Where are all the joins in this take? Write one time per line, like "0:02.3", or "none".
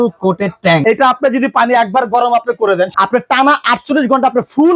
0:00.8
0:02.9